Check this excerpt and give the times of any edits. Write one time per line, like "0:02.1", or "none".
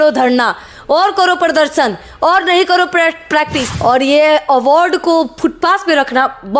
0:03.6